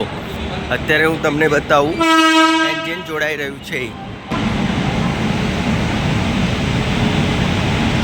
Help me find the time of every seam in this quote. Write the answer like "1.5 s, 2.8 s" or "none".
4.3 s